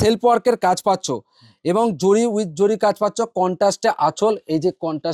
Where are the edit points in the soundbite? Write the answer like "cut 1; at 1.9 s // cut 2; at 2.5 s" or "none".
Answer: none